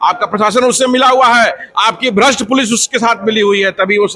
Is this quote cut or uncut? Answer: uncut